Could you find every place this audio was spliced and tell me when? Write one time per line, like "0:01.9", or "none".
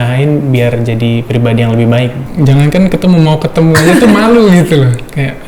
0:02.2